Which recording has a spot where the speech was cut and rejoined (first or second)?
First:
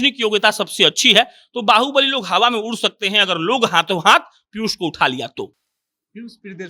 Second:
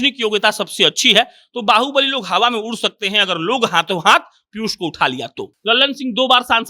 second